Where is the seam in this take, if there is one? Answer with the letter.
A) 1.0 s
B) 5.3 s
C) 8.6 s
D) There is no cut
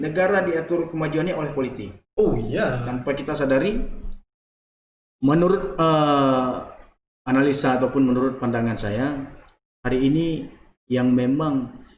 D